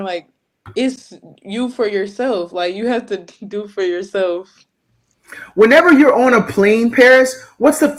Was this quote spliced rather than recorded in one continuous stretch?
no; 0 cuts

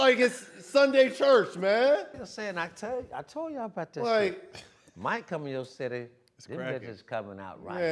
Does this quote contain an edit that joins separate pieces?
no; 0 cuts

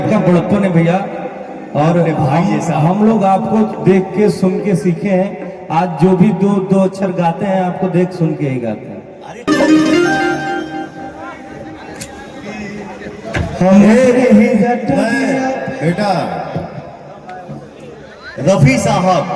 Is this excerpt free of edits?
no; 1 cut; at 9.5 s

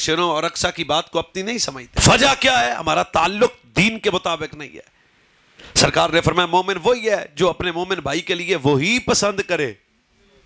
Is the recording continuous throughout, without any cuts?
yes; 0 cuts

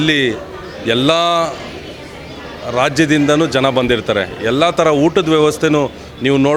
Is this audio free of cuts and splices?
yes; 0 cuts

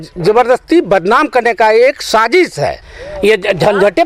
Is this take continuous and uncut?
no; 1 cut; at 2.7 s

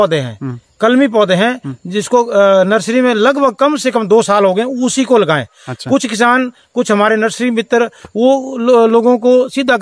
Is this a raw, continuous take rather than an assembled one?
yes; 0 cuts

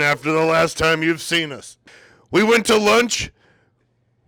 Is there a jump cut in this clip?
no; 0 cuts

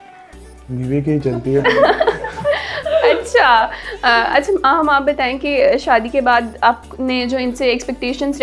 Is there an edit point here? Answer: no; 0 cuts

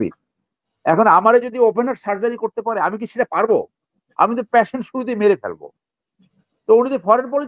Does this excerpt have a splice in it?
no; 0 cuts

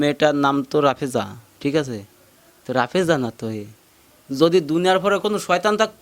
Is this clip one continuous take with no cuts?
yes; 0 cuts

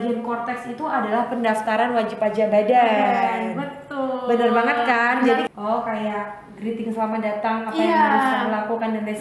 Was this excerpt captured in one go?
no; 1 cut; at 5.4 s

